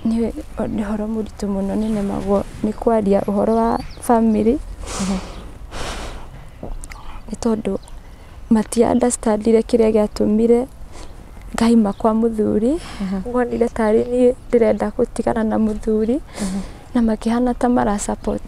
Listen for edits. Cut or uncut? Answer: uncut